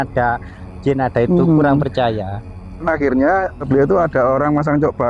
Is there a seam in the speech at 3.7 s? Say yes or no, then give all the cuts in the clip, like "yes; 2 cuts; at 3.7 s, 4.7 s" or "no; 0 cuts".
yes; 2 cuts; at 2.7 s, 3.7 s